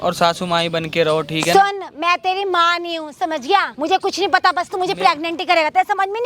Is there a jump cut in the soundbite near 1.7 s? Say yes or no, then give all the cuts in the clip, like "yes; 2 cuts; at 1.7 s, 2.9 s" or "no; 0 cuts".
no; 1 cut; at 3.7 s